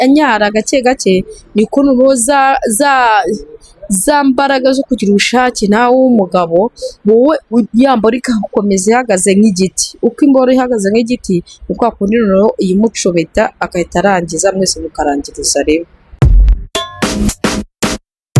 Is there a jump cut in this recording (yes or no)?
yes